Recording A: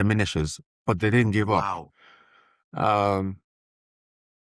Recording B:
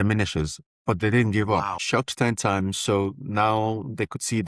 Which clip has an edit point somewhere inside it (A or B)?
B